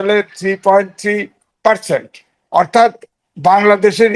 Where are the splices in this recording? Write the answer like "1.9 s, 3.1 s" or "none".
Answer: none